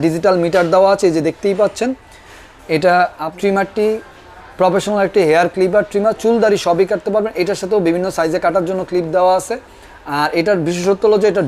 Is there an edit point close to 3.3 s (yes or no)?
yes